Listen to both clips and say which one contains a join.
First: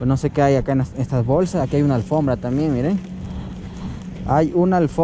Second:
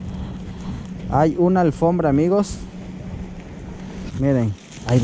second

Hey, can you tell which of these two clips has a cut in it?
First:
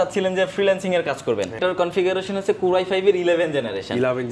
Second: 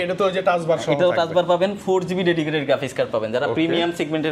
first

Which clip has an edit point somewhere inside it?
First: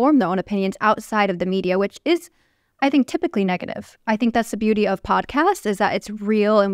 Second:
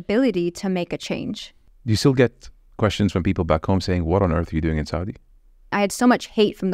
second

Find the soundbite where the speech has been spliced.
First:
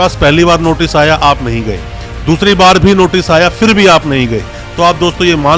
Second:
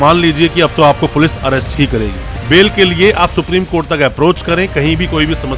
second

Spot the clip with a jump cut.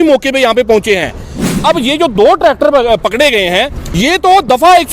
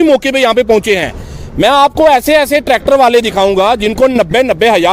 first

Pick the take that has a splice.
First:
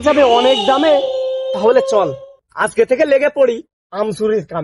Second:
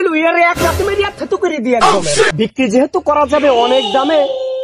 second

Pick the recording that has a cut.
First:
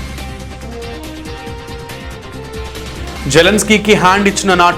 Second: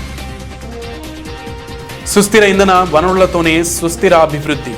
first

